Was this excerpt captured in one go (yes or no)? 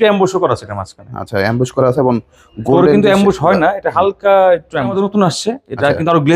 no